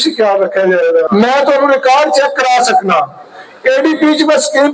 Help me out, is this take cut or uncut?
cut